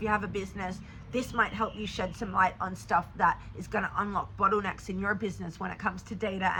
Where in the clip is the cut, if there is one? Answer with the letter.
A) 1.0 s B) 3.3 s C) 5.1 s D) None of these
D